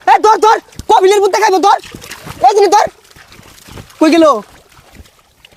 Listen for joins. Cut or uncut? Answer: uncut